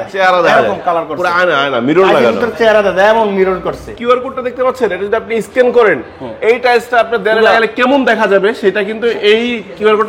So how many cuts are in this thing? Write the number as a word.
one